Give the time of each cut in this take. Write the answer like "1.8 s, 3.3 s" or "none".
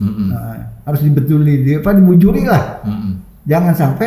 none

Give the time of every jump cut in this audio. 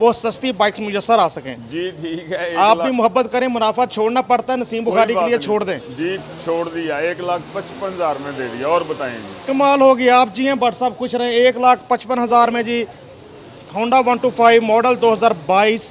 none

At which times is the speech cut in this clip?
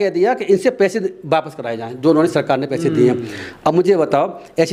none

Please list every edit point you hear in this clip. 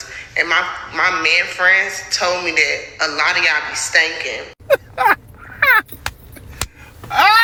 none

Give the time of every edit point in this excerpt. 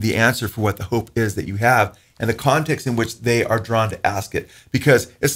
none

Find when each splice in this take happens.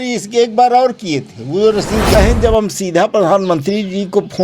2.1 s

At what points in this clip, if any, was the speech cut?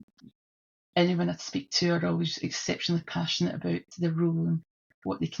none

